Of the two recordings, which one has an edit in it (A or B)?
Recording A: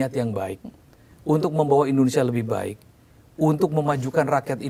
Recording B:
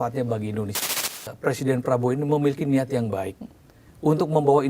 B